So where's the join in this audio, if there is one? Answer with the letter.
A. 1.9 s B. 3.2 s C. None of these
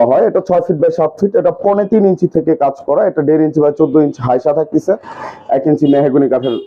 C